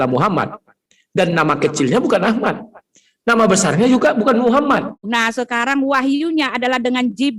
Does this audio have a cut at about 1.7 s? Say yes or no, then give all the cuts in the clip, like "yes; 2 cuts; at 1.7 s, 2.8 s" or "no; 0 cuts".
no; 1 cut; at 5.1 s